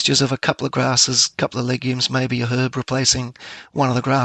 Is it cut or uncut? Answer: uncut